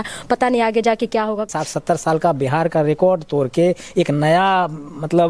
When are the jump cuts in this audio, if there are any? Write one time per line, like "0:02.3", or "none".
0:01.5